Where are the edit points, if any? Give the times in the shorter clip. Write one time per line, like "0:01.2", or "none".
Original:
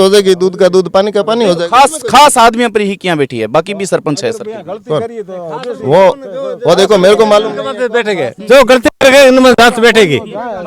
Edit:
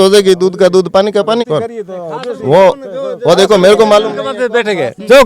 0:01.4